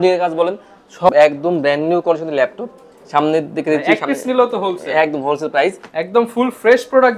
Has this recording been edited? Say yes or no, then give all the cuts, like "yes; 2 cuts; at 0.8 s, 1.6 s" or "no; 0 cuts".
yes; 2 cuts; at 1.1 s, 5.8 s